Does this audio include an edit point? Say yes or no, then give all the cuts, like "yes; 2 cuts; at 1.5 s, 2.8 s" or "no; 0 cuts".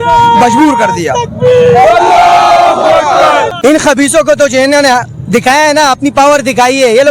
yes; 1 cut; at 3.5 s